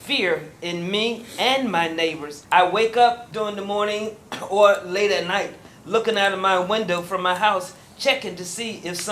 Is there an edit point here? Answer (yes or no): yes